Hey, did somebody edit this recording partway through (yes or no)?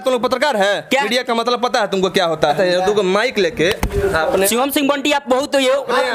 yes